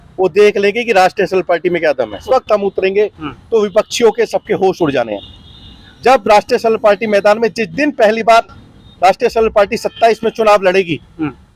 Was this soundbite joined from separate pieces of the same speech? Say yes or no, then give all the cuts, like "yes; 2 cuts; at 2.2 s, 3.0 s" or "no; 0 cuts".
yes; 1 cut; at 2.2 s